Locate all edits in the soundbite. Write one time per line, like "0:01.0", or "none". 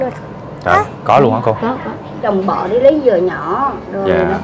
0:02.2